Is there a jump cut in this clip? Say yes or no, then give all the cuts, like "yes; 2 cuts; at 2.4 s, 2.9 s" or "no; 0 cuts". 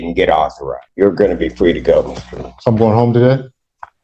no; 0 cuts